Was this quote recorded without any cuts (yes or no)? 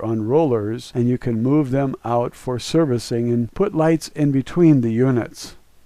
yes